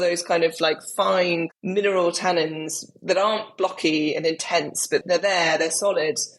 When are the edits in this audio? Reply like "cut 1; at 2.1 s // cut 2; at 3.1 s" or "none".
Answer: cut 1; at 1.5 s

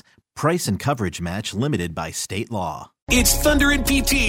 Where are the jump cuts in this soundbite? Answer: cut 1; at 3.0 s

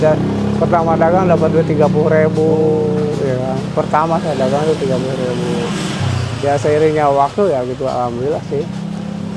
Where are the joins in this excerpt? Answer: none

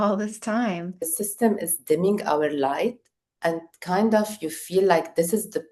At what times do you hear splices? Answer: cut 1; at 1.2 s

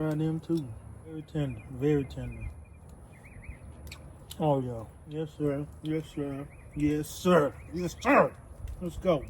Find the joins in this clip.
cut 1; at 1.3 s // cut 2; at 2.7 s // cut 3; at 5.0 s

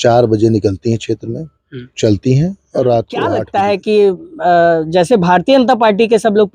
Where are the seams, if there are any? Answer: cut 1; at 3.4 s

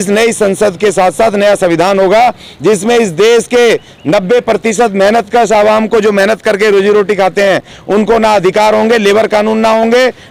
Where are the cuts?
none

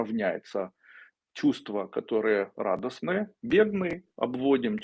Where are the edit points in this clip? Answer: none

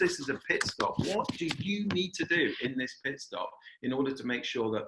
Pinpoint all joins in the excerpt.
none

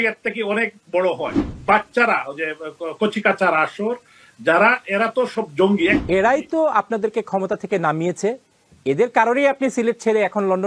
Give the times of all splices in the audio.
cut 1; at 1.5 s // cut 2; at 6.0 s

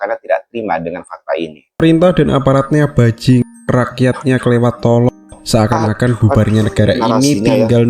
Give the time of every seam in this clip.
cut 1; at 1.8 s

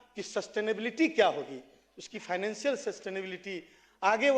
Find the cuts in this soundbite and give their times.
none

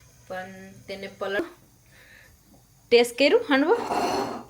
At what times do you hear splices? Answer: cut 1; at 1.4 s

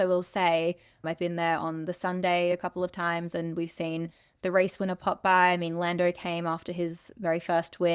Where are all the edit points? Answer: cut 1; at 0.9 s // cut 2; at 2.5 s

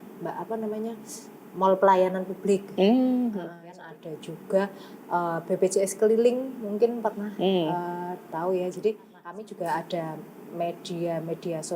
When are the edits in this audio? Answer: cut 1; at 3.8 s // cut 2; at 9.4 s

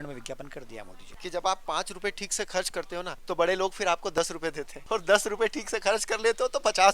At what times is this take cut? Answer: cut 1; at 1.0 s // cut 2; at 3.2 s // cut 3; at 4.7 s

